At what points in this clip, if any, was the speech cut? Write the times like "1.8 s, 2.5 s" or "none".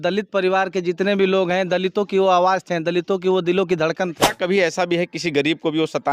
4.3 s